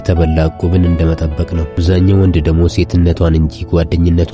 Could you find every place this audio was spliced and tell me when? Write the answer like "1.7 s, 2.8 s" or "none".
1.8 s